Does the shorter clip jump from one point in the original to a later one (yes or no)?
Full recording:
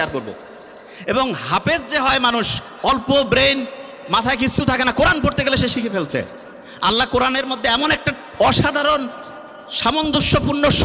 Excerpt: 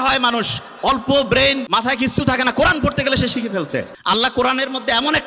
yes